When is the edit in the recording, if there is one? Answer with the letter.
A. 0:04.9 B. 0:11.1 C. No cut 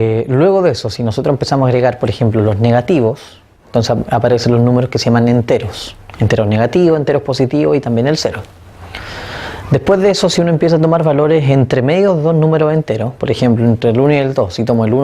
A